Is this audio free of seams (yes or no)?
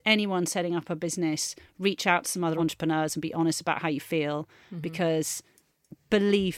no